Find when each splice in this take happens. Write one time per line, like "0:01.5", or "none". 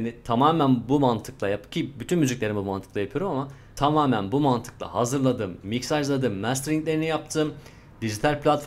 0:03.6

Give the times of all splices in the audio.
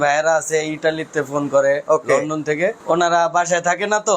0:02.8

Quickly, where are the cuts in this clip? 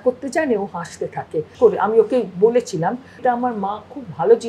0:01.5
0:03.2

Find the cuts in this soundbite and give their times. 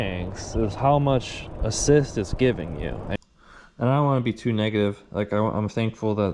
0:03.2

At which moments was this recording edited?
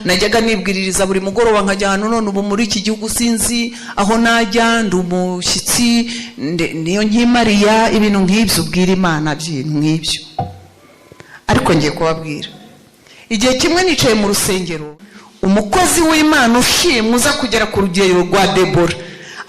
0:14.8

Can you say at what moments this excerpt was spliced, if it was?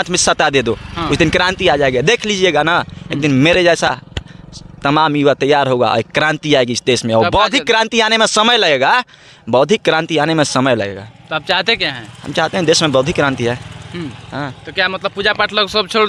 none

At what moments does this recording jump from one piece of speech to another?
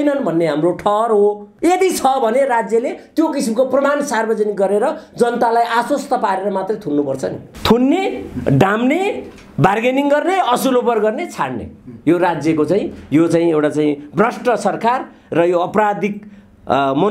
0:01.5
0:07.4

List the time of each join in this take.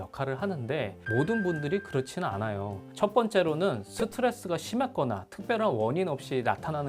0:01.0
0:02.8

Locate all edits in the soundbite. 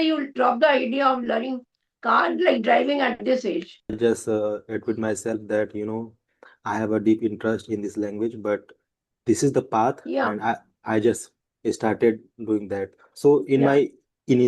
0:04.0

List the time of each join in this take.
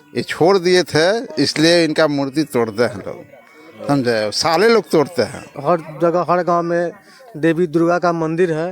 0:05.5

